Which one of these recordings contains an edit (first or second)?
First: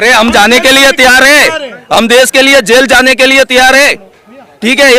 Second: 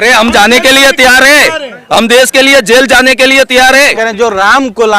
second